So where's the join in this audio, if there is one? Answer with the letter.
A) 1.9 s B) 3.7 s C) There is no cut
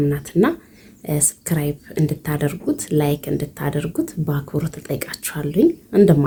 C